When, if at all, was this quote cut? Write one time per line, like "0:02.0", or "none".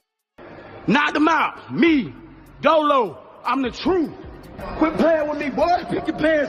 none